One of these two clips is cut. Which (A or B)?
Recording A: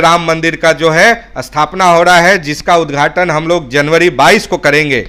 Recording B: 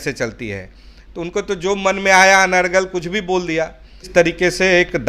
B